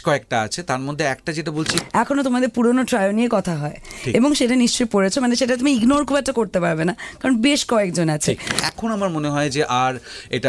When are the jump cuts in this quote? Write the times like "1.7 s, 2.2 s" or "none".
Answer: 1.8 s, 8.5 s